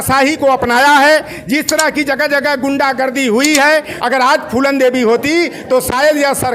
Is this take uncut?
no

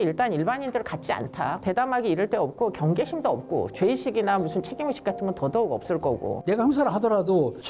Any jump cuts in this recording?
yes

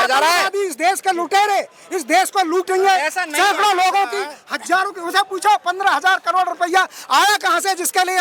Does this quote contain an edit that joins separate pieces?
no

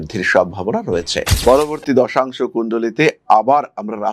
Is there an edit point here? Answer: yes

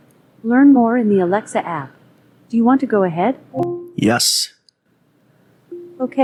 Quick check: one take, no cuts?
yes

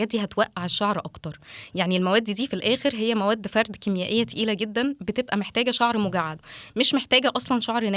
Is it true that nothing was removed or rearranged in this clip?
yes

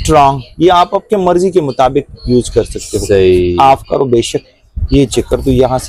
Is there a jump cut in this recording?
no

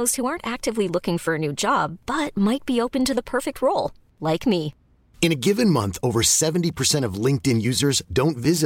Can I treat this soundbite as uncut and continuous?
yes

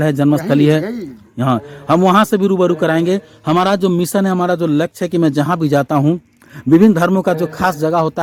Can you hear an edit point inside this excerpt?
no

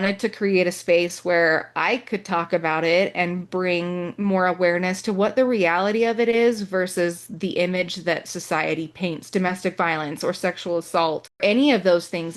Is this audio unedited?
no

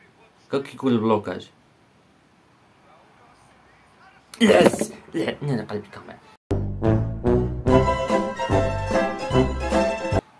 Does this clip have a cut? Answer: no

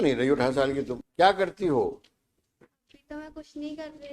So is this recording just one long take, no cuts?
no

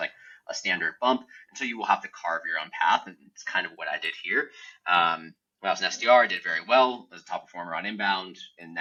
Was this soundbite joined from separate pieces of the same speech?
no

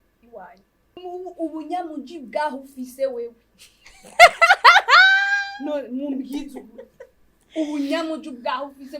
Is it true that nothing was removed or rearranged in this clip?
no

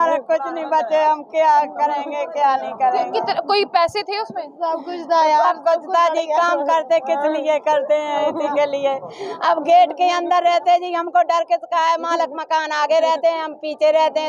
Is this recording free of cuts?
yes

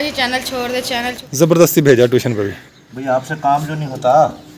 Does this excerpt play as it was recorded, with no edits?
no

